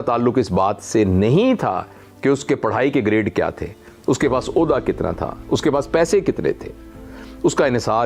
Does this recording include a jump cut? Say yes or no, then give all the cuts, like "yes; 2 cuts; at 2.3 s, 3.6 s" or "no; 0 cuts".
no; 0 cuts